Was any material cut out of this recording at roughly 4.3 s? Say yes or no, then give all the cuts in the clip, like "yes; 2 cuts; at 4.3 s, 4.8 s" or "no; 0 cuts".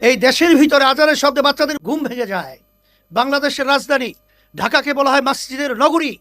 no; 1 cut; at 1.8 s